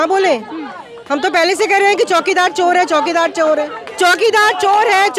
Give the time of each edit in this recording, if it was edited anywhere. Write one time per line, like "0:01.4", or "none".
0:03.8